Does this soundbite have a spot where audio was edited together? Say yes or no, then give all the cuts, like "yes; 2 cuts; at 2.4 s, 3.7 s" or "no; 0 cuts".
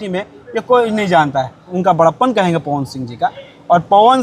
yes; 1 cut; at 1.8 s